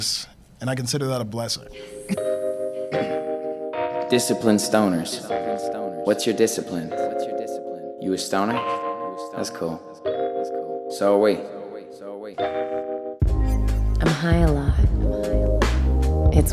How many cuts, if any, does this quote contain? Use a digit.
1